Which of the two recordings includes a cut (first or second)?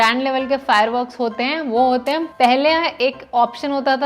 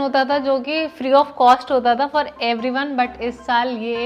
first